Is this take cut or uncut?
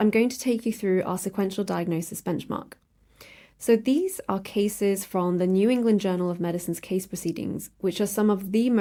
uncut